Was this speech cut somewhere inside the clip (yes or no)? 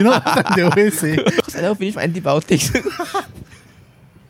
yes